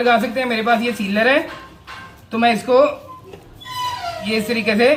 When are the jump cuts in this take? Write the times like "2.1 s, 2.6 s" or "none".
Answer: none